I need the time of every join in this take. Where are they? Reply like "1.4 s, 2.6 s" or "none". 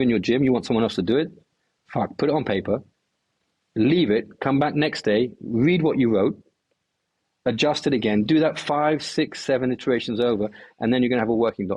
none